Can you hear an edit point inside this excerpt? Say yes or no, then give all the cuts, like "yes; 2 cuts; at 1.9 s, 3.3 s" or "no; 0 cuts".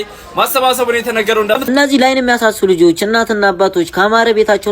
yes; 1 cut; at 1.7 s